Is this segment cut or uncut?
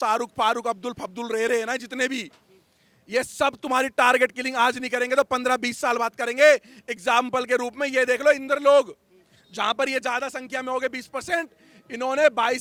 uncut